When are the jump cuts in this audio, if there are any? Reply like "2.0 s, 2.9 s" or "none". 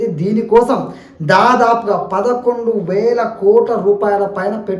none

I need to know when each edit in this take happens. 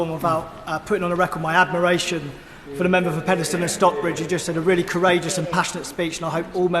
none

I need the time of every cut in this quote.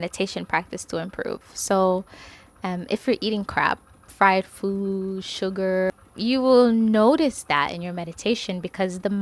5.9 s

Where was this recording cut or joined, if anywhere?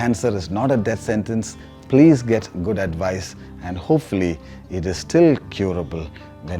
none

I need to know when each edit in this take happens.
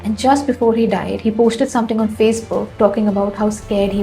none

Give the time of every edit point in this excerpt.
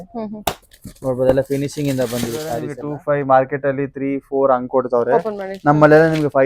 2.7 s

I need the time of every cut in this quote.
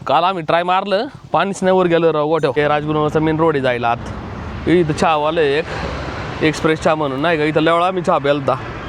2.6 s

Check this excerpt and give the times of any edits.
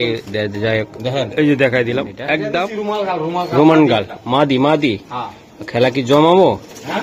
2.4 s

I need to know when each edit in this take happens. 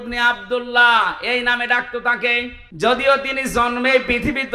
2.6 s

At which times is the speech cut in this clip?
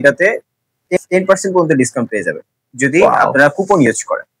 1.0 s

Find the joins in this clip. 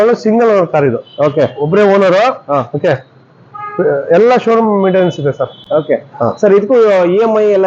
none

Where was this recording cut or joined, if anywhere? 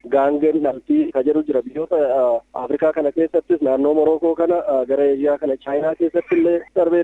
1.1 s

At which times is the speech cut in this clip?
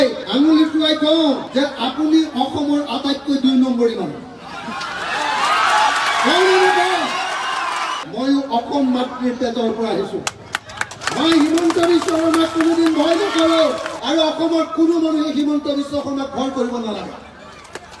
none

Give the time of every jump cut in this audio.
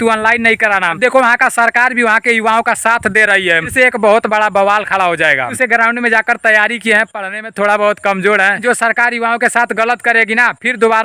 1.0 s, 3.7 s, 5.6 s, 8.6 s

